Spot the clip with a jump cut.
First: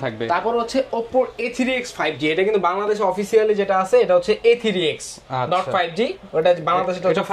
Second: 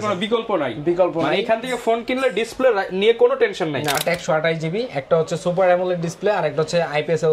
second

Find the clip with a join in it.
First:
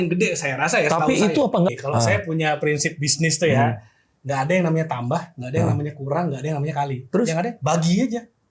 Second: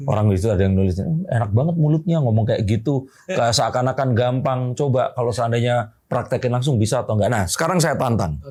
first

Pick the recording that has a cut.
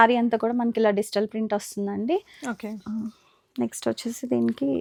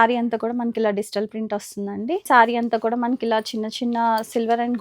second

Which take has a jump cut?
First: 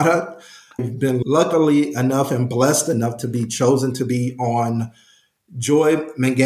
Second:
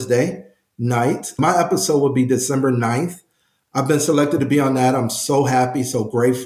second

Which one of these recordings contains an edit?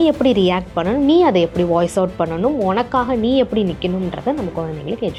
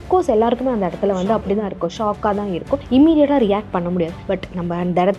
second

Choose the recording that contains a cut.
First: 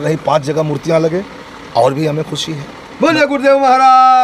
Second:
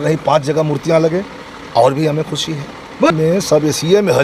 second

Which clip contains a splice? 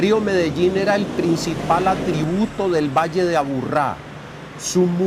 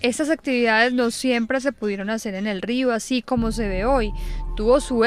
second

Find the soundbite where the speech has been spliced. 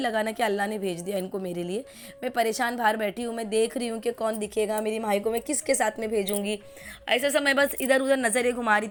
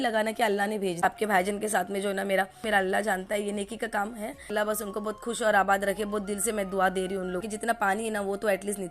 second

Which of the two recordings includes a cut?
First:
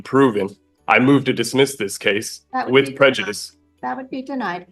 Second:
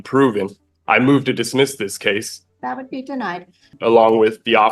second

